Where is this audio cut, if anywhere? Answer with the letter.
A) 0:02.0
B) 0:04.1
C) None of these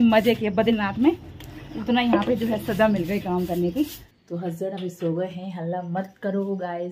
B